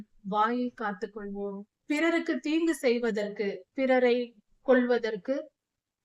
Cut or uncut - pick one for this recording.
cut